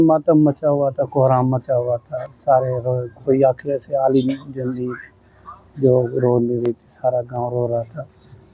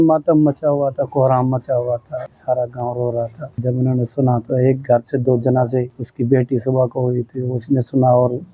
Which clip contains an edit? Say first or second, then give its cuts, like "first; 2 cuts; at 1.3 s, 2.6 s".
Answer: second; 3 cuts; at 2.3 s, 3.5 s, 6.0 s